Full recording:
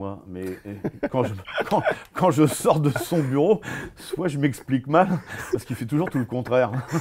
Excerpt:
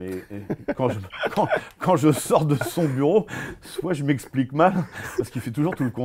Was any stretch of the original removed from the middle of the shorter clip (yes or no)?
no